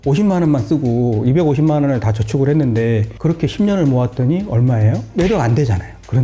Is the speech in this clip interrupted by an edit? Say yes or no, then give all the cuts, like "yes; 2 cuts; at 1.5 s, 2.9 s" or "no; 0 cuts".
no; 0 cuts